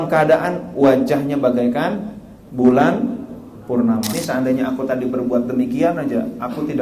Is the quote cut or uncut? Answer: cut